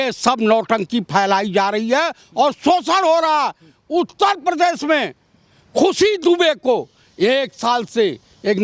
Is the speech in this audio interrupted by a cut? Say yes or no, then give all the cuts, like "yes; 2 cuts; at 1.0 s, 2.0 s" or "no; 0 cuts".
no; 0 cuts